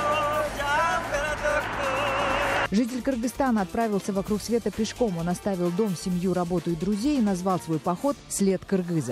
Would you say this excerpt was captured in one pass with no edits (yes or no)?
yes